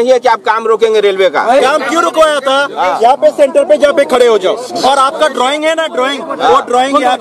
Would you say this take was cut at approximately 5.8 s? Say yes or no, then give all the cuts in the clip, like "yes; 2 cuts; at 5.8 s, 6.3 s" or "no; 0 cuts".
no; 0 cuts